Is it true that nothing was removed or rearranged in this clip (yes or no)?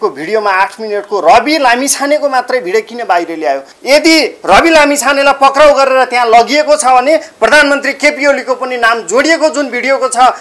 no